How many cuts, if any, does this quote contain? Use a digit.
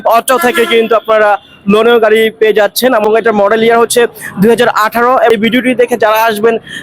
2